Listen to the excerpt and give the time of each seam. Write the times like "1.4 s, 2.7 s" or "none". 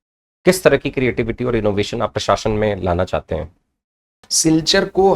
4.2 s